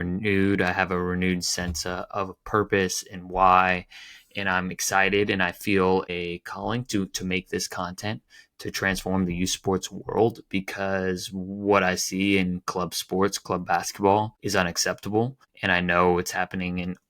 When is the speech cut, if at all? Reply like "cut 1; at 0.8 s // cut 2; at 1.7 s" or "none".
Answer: cut 1; at 2.1 s // cut 2; at 6.1 s // cut 3; at 14.4 s // cut 4; at 15.5 s